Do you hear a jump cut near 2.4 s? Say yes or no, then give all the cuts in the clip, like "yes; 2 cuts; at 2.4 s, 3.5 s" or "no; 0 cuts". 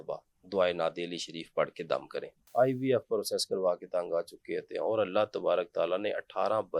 yes; 1 cut; at 2.4 s